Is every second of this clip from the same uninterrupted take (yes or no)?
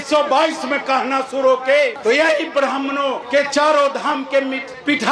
yes